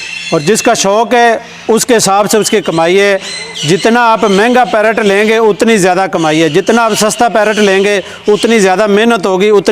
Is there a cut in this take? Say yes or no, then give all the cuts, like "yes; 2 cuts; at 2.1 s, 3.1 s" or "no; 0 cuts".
no; 0 cuts